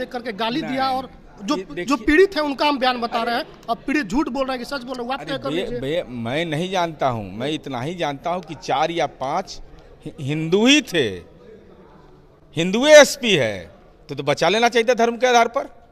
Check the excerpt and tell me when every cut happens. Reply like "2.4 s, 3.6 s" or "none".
none